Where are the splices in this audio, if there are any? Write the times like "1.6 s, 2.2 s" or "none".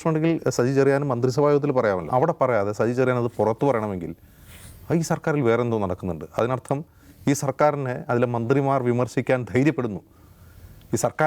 2.1 s